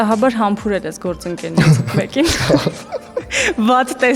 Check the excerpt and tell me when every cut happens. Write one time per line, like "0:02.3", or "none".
none